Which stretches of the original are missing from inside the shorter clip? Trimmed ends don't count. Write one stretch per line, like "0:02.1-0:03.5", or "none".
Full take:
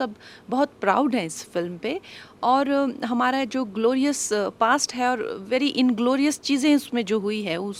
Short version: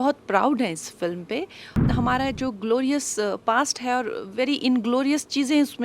0:02.4-0:03.0